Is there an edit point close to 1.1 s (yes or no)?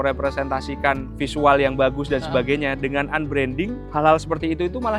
yes